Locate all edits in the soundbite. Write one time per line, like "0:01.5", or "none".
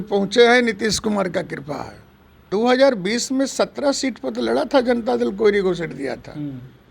0:02.5